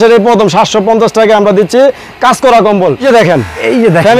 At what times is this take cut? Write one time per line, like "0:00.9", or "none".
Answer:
0:03.0